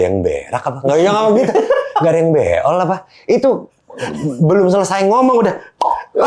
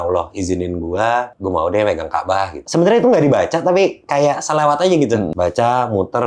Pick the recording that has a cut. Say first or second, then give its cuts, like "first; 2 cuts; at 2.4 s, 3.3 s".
second; 3 cuts; at 1.3 s, 2.6 s, 5.3 s